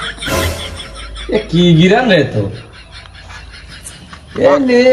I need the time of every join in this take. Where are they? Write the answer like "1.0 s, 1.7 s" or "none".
none